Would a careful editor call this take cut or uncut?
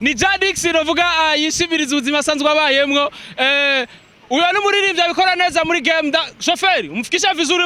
uncut